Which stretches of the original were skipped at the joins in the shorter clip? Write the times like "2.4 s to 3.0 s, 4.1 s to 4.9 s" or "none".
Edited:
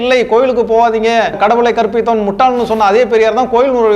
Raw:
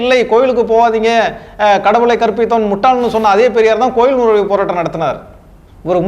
1.4 s to 1.8 s